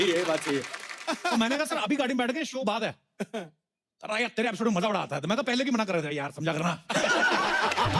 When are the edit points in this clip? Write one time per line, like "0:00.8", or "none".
none